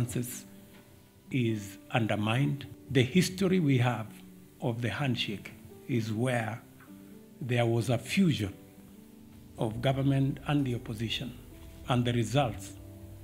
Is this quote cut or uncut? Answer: cut